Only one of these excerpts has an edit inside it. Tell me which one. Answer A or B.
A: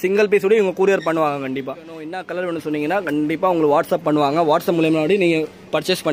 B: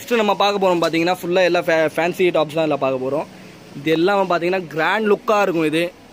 A